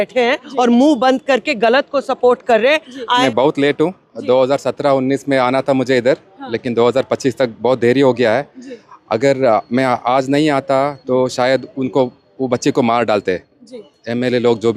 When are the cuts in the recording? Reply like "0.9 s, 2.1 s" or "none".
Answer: 3.2 s